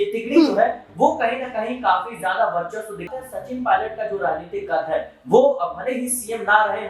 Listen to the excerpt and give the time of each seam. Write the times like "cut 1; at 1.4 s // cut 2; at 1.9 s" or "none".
cut 1; at 3.1 s